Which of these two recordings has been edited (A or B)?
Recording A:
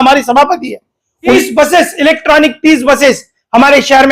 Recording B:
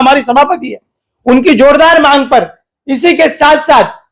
A